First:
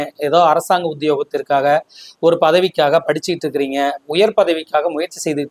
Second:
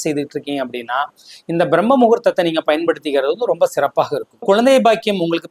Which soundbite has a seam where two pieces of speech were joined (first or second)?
second